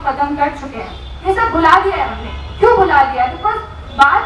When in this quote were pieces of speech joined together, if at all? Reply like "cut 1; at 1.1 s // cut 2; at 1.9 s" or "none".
cut 1; at 1.0 s